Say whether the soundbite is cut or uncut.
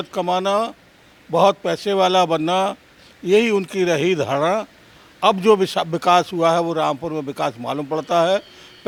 uncut